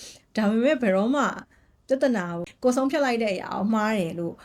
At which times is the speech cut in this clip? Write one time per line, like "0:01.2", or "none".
0:02.4